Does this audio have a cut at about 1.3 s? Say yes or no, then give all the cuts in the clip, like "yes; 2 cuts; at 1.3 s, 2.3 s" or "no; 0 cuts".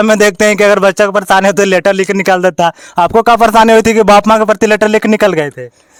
no; 0 cuts